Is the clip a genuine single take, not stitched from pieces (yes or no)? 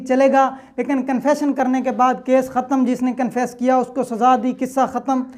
yes